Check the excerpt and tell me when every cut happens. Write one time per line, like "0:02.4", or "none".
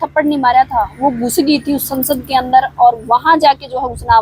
none